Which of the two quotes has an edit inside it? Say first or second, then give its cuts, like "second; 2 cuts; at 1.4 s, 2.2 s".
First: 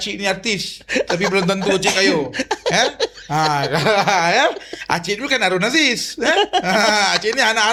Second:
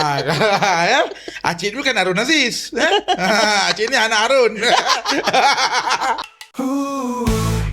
second; 1 cut; at 6.2 s